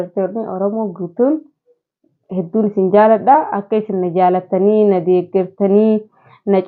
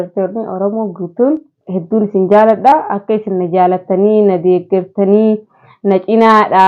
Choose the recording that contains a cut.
second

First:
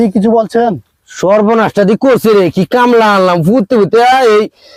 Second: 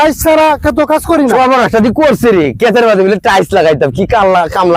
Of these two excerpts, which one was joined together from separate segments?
second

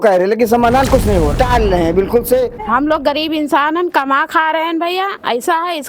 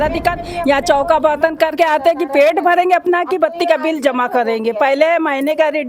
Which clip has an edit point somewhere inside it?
first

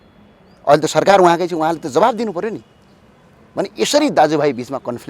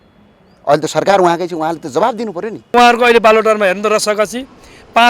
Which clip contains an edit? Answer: second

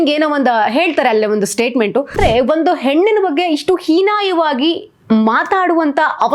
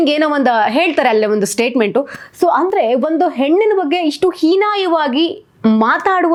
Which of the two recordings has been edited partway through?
first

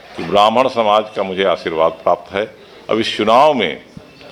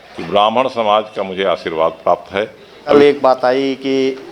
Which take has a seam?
second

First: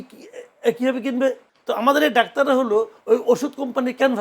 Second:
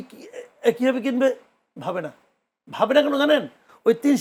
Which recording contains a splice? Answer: first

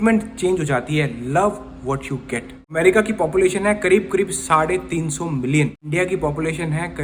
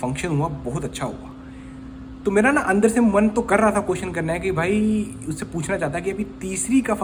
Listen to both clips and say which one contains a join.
first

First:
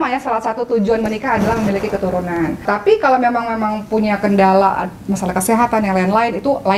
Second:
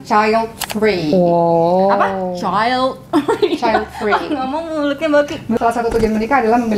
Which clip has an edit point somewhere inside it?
second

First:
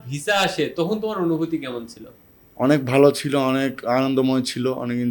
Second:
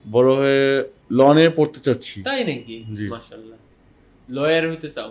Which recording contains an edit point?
second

